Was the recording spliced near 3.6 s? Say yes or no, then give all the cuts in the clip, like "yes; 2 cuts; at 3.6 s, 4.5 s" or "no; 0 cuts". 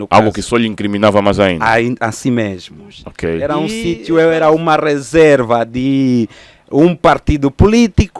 yes; 1 cut; at 3.6 s